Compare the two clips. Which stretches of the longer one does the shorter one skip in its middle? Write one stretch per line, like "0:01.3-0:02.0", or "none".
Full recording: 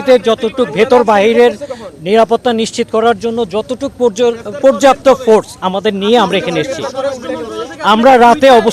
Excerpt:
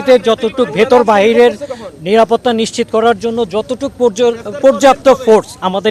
none